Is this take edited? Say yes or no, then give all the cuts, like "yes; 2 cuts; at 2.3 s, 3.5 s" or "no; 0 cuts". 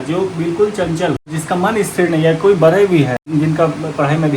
yes; 2 cuts; at 1.3 s, 3.2 s